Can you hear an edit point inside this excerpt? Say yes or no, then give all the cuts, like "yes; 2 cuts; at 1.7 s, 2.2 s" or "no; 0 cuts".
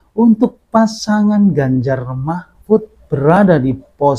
yes; 1 cut; at 3.0 s